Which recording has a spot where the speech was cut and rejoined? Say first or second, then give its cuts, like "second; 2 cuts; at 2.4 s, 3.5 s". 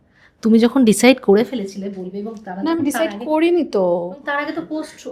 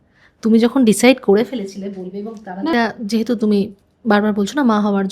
second; 1 cut; at 2.7 s